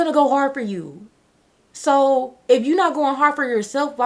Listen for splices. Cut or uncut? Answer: uncut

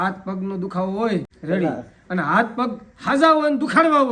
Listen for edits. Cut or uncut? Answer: cut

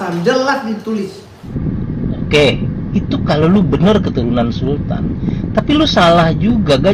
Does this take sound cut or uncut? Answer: cut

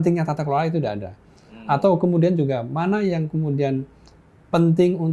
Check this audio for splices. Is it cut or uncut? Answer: uncut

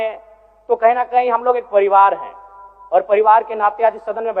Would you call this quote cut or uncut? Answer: uncut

